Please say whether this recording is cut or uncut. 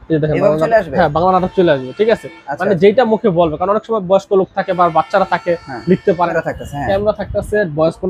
cut